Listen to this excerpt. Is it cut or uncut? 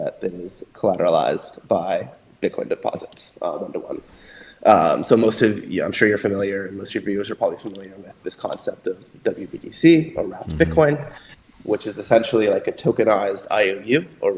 uncut